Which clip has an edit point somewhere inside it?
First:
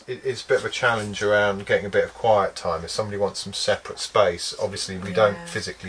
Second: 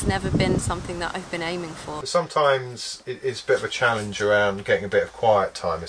second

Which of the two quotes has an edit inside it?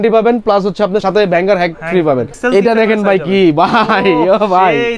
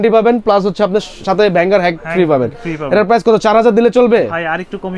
first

